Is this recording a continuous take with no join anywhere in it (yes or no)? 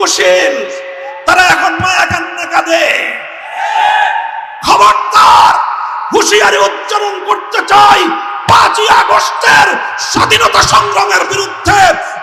yes